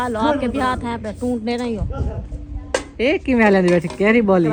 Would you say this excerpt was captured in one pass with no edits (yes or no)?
yes